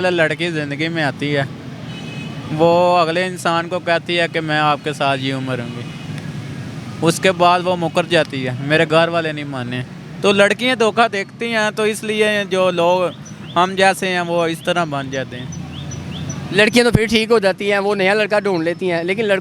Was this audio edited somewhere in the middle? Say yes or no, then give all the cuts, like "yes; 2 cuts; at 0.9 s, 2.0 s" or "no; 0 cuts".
no; 0 cuts